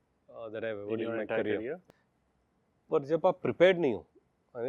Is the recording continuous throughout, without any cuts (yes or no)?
no